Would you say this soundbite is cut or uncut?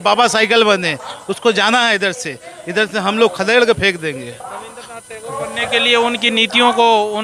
uncut